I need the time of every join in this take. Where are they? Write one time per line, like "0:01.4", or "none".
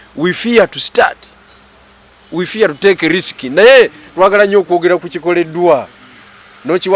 none